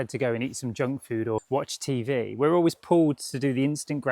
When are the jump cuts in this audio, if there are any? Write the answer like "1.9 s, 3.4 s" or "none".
1.4 s